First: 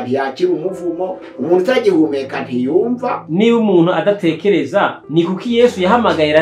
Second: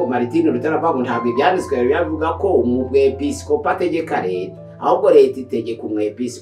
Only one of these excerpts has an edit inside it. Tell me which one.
first; 2 cuts; at 3.2 s, 5.0 s

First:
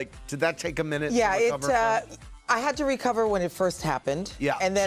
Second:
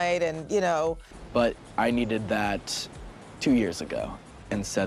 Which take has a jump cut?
second; 1 cut; at 1.1 s

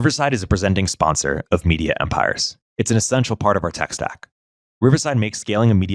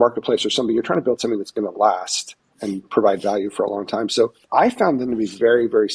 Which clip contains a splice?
second; 2 cuts; at 2.6 s, 4.4 s

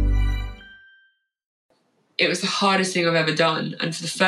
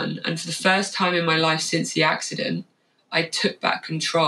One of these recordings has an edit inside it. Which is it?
first; 1 cut; at 1.6 s

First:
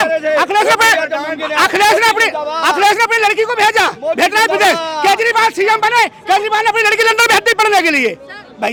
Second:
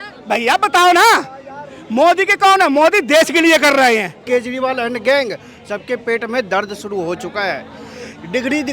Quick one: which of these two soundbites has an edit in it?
second; 1 cut; at 4.2 s

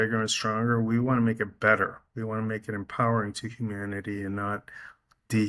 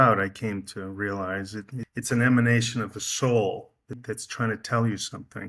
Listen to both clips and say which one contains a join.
second; 2 cuts; at 1.8 s, 4.0 s

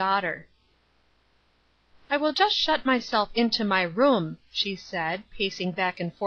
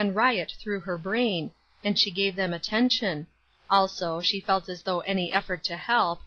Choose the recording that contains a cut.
first; 1 cut; at 1.9 s

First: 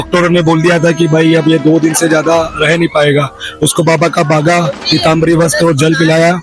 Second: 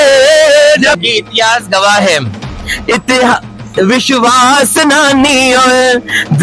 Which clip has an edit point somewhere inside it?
second; 1 cut; at 1.0 s

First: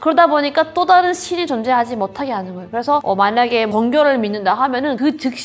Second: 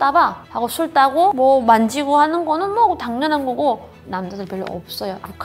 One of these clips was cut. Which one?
second; 1 cut; at 4.0 s

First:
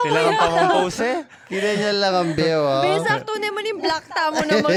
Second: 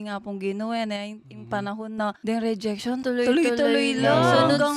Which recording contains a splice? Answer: second; 2 cuts; at 2.2 s, 3.0 s

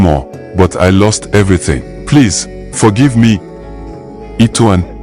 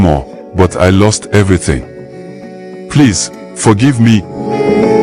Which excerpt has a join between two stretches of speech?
first; 2 cuts; at 1.9 s, 3.8 s

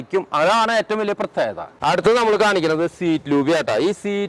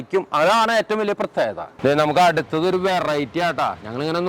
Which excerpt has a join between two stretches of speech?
second; 1 cut; at 1.7 s

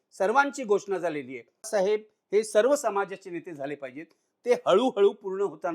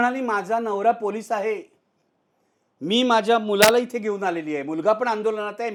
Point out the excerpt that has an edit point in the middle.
first; 1 cut; at 1.7 s

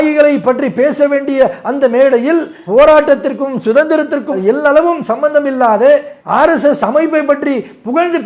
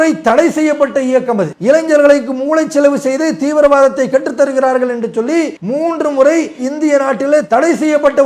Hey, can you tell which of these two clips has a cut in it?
second; 2 cuts; at 1.5 s, 5.6 s

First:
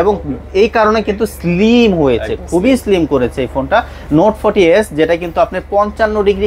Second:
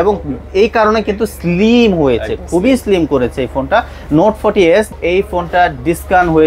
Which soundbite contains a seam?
second; 1 cut; at 4.9 s

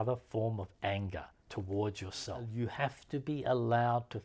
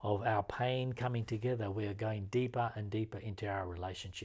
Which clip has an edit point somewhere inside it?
first; 1 cut; at 2.5 s

